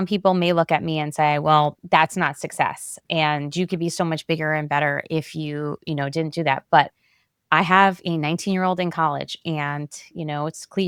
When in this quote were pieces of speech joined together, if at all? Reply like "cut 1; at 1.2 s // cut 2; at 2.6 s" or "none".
none